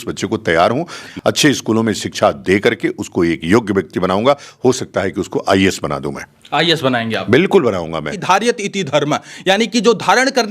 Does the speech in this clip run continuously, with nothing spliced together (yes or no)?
no